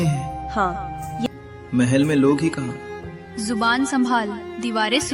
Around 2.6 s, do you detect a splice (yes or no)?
no